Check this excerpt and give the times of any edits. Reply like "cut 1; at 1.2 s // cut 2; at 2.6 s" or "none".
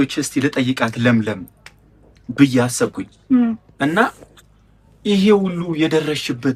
none